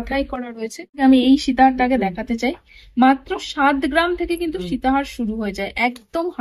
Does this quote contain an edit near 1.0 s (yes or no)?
yes